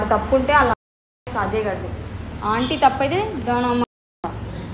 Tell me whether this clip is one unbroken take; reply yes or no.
yes